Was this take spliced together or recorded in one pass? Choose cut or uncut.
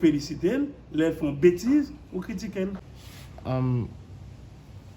cut